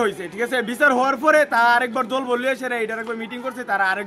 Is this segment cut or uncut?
uncut